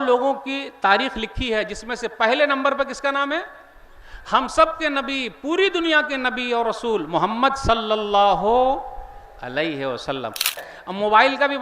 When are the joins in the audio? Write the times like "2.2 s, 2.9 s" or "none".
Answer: 10.6 s